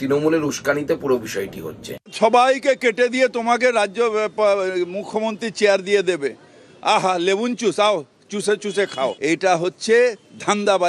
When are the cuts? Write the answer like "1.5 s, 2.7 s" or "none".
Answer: 2.1 s, 9.2 s

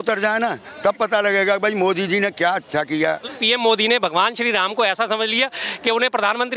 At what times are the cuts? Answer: 3.4 s

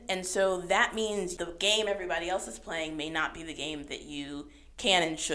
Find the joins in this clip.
1.3 s

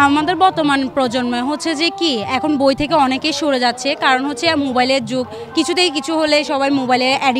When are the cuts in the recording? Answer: none

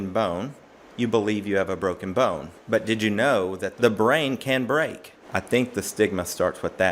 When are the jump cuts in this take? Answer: 2.5 s, 3.7 s, 5.2 s

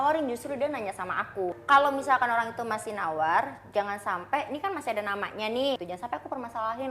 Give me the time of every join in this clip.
1.6 s, 5.9 s

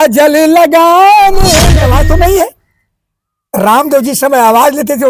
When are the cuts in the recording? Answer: 1.7 s

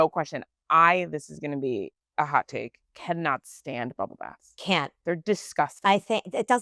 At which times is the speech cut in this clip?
2.0 s

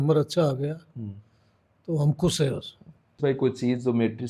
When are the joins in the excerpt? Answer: 3.2 s

